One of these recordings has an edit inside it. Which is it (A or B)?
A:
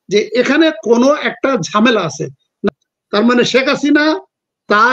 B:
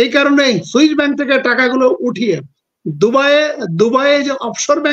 A